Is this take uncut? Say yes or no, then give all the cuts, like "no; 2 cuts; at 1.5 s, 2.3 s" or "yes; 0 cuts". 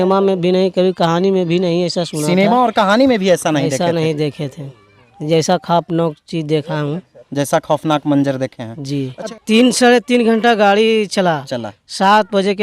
no; 1 cut; at 9.4 s